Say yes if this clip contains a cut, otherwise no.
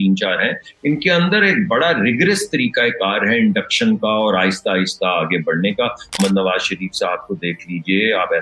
yes